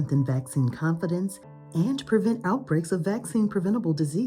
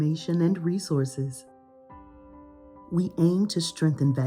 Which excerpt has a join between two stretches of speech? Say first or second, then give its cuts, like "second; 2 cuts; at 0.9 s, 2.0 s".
second; 2 cuts; at 1.5 s, 2.9 s